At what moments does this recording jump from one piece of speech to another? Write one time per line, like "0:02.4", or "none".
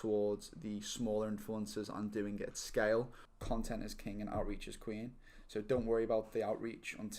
0:03.2

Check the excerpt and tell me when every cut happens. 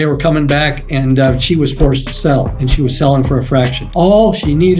none

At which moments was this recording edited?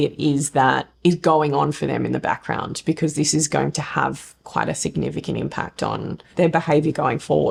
none

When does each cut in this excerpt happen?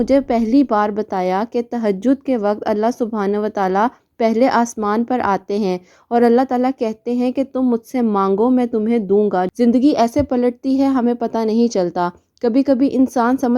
0:09.5

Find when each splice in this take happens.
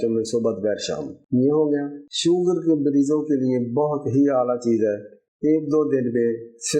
0:02.0

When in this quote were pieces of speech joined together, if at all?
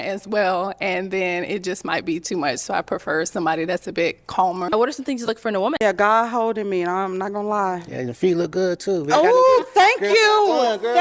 0:04.7
0:05.8

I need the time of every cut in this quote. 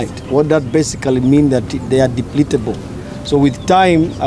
none

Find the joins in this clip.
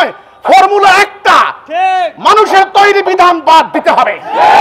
none

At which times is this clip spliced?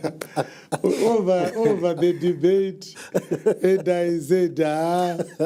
none

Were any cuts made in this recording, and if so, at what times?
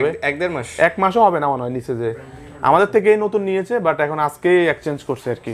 none

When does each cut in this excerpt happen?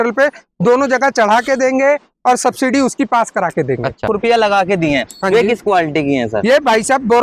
0:04.2

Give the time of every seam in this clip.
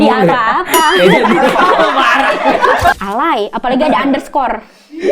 0:02.9

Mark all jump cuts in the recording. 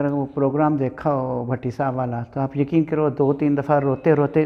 none

